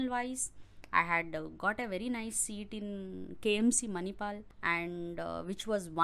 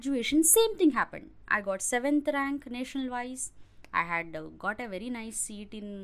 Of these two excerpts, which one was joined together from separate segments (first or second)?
first